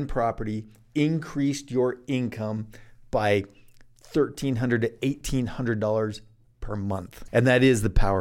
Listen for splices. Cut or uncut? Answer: cut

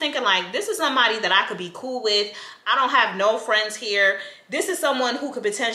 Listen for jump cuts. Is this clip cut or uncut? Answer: uncut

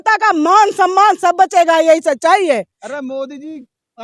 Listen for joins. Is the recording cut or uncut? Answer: uncut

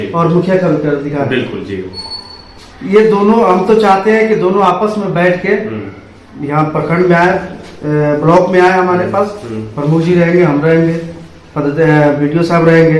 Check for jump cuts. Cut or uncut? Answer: uncut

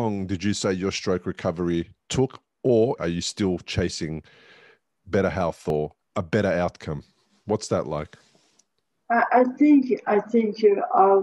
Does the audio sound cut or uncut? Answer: cut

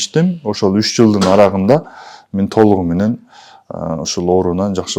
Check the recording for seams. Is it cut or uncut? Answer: uncut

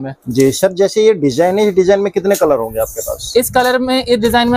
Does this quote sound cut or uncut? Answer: uncut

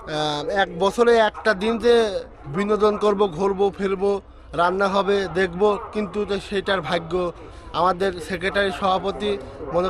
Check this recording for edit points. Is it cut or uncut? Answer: uncut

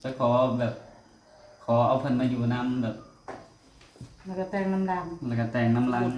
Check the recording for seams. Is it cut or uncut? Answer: uncut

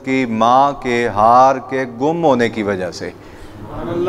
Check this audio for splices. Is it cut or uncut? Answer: uncut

